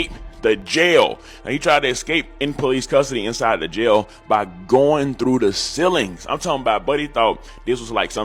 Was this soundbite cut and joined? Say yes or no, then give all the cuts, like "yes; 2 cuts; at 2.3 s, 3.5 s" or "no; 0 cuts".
no; 0 cuts